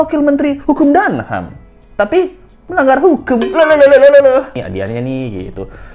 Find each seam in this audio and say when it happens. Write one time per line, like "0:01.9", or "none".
0:04.6